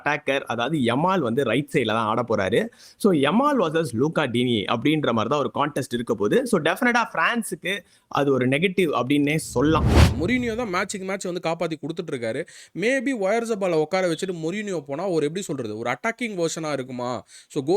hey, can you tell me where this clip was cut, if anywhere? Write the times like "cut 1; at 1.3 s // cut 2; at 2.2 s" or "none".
cut 1; at 10.0 s